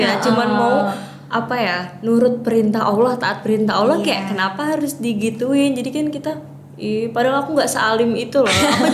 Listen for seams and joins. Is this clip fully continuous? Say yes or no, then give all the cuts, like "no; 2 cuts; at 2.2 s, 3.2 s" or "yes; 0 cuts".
yes; 0 cuts